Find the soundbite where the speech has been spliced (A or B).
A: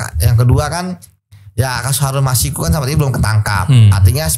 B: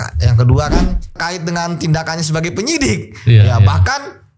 B